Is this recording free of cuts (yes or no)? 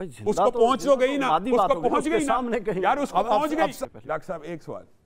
no